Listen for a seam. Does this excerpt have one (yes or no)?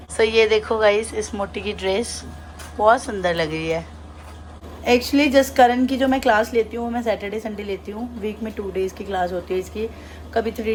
no